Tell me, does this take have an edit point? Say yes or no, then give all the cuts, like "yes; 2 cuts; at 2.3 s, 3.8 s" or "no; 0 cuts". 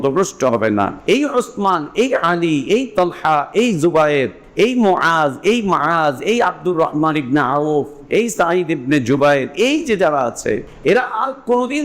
yes; 3 cuts; at 1.0 s, 4.4 s, 10.7 s